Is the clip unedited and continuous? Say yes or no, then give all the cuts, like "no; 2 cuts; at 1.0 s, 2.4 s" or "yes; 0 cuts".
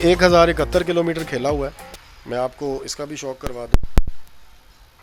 yes; 0 cuts